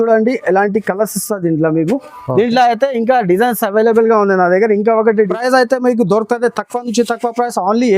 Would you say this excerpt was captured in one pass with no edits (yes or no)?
no